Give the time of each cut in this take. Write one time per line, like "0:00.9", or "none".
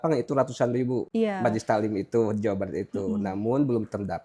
0:01.1